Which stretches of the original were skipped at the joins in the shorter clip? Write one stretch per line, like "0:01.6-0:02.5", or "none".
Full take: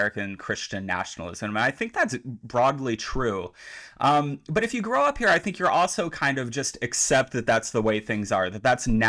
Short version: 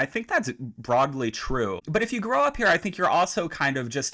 0:03.5-0:04.4